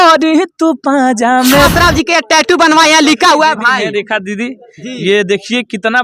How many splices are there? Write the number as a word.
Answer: one